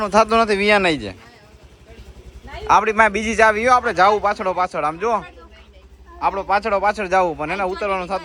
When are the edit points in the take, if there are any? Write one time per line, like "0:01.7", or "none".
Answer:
none